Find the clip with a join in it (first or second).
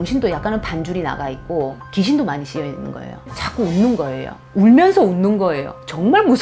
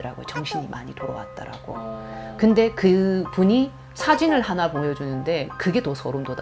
first